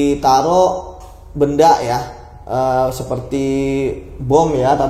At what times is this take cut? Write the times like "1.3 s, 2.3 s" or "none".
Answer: none